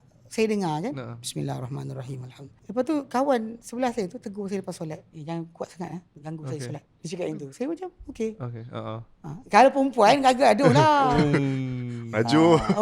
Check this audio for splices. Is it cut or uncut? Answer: cut